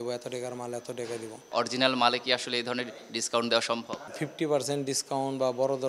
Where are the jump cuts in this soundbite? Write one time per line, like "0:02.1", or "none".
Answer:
0:01.5
0:04.0